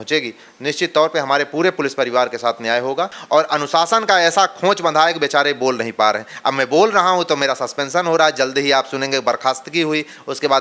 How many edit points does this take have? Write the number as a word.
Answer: one